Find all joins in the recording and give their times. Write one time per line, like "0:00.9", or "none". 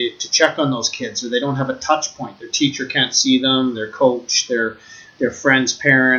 none